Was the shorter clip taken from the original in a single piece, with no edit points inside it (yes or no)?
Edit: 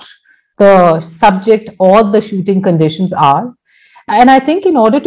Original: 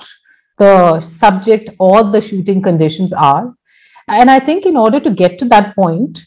yes